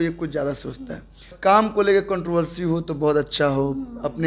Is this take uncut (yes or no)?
no